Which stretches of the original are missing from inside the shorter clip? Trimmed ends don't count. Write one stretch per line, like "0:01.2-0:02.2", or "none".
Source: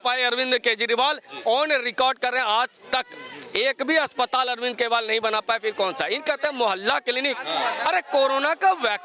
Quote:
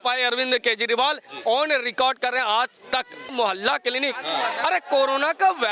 0:03.3-0:06.5

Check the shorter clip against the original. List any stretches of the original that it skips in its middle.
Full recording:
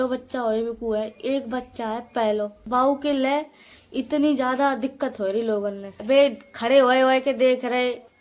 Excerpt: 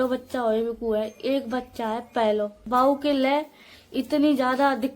none

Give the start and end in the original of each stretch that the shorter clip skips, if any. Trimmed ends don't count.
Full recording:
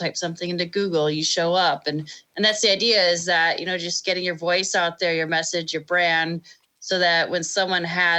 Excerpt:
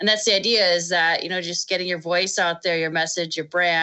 none

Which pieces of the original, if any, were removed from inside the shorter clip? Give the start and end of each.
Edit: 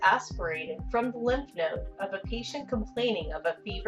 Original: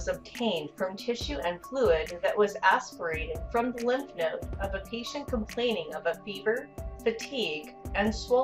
none

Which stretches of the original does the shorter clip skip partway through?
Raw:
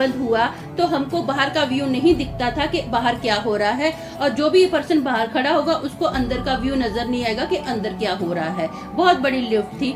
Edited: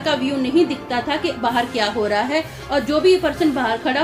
none

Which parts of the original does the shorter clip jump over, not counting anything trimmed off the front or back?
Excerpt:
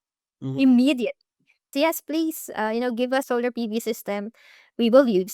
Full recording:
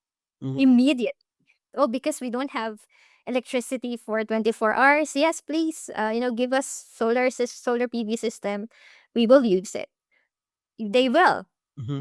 0:01.7-0:05.1
0:06.7-0:07.6

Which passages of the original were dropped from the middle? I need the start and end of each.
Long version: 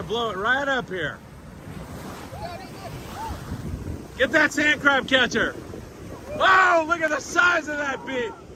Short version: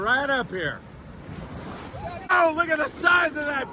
0:02.7-0:06.6

